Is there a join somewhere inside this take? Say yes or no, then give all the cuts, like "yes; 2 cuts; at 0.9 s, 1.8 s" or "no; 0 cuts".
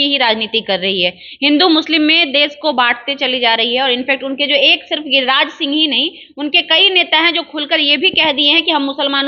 no; 0 cuts